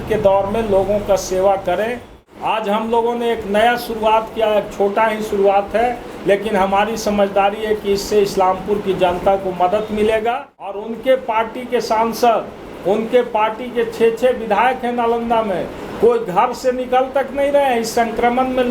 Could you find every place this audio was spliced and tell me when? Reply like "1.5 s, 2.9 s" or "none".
2.1 s, 10.7 s